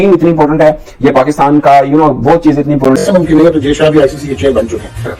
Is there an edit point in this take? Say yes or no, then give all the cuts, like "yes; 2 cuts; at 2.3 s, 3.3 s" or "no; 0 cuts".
yes; 1 cut; at 3.0 s